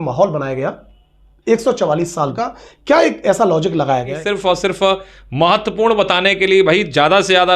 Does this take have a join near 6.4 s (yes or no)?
no